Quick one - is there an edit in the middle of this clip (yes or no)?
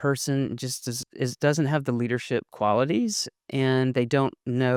no